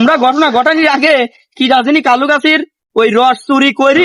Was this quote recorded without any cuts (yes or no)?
yes